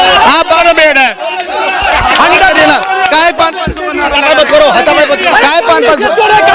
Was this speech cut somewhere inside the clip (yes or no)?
no